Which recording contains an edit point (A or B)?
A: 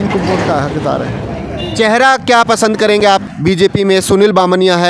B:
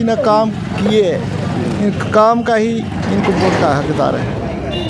A